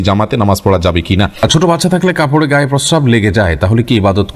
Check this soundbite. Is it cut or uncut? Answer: cut